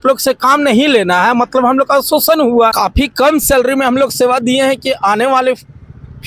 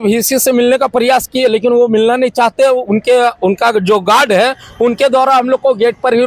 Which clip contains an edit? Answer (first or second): first